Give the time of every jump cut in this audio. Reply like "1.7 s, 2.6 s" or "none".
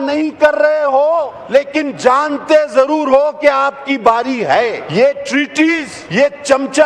1.4 s, 4.8 s, 5.9 s